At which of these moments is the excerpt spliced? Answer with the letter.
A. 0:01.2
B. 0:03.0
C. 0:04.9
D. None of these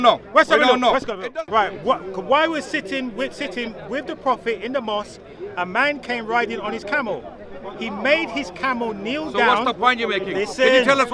A